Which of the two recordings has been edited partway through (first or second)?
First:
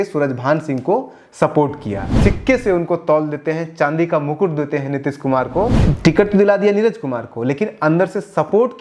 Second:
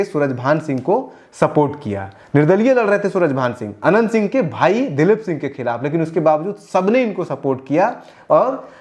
first